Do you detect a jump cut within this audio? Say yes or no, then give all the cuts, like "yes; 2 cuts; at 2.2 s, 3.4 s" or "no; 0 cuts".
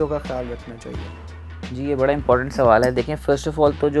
no; 0 cuts